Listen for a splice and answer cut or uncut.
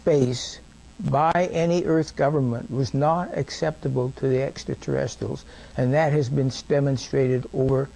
uncut